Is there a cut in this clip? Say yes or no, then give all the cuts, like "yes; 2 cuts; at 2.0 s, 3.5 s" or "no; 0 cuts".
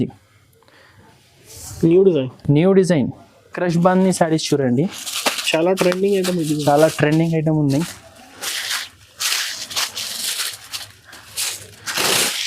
yes; 1 cut; at 3.5 s